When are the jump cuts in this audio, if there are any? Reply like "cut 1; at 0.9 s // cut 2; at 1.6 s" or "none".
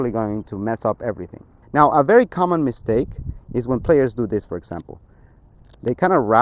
cut 1; at 1.6 s